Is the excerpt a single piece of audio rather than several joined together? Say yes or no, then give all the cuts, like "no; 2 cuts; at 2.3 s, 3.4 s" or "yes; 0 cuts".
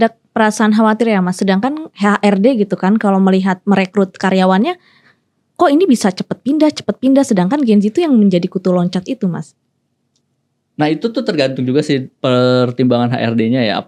yes; 0 cuts